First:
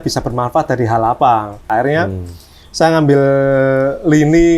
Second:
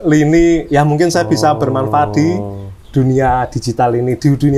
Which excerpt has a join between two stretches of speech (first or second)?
first